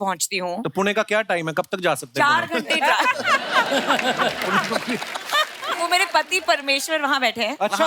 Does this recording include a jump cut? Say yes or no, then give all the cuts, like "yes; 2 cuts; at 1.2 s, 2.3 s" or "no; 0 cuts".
no; 0 cuts